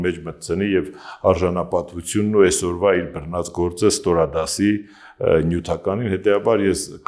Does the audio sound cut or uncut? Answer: uncut